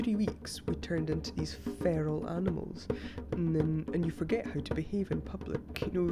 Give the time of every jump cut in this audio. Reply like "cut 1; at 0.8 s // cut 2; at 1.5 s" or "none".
none